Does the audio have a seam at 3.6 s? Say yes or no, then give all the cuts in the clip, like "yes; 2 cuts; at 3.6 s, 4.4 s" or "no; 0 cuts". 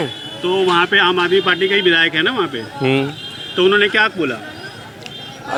no; 0 cuts